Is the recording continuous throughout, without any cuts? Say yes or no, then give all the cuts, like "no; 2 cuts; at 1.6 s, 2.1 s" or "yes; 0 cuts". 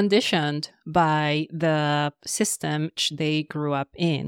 no; 1 cut; at 3.0 s